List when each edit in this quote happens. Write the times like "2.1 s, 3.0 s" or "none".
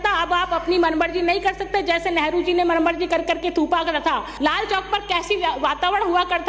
4.3 s